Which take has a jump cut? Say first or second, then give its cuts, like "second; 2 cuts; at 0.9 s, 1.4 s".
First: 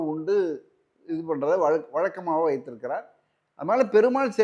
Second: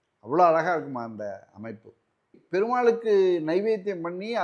second; 1 cut; at 2.4 s